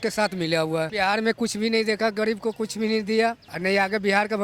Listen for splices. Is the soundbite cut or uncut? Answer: cut